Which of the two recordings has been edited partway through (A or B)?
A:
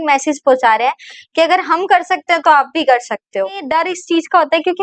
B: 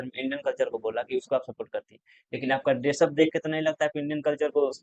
A